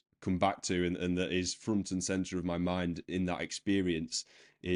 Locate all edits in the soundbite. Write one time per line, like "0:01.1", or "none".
none

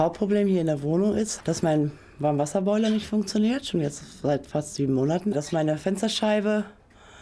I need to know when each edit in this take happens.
0:01.3
0:05.3

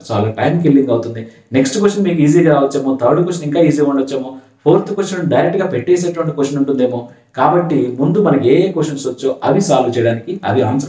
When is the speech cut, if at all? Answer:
none

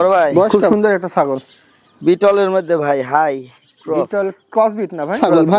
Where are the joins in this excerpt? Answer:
none

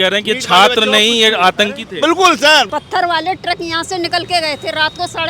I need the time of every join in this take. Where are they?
0:02.7

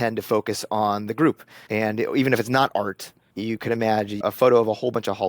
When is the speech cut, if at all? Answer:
0:01.5
0:04.2

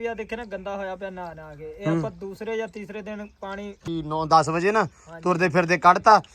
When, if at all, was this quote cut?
0:03.9

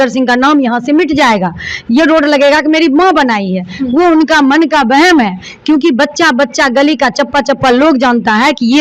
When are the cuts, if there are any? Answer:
none

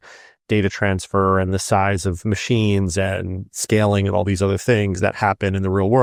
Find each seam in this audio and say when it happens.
none

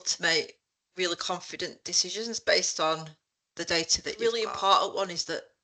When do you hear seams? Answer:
0:04.0

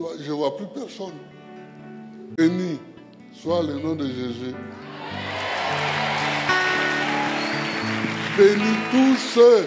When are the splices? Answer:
0:02.4

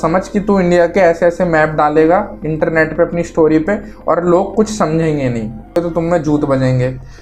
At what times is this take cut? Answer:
0:05.8

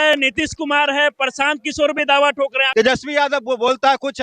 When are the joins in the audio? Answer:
0:02.6

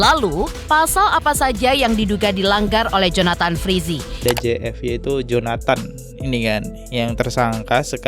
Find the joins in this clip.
0:04.2

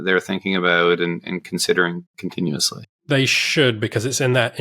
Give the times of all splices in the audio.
0:03.0

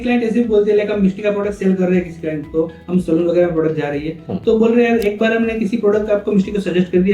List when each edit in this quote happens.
none

